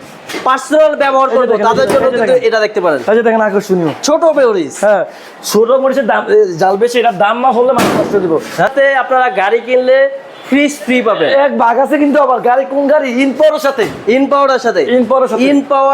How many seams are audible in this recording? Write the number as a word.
one